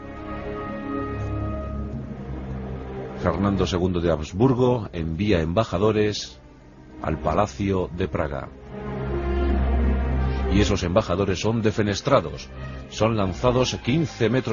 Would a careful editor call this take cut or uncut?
uncut